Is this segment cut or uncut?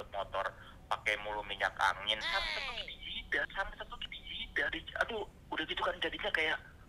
uncut